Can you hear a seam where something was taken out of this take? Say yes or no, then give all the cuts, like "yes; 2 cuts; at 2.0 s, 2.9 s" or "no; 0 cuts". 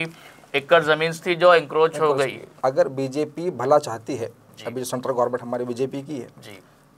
yes; 1 cut; at 2.4 s